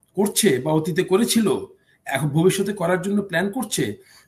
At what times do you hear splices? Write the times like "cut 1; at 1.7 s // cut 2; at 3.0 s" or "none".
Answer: none